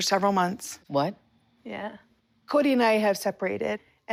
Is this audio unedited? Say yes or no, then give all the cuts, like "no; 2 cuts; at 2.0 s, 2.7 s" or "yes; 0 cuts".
yes; 0 cuts